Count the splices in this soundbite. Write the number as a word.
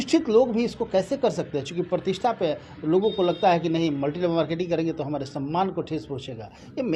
zero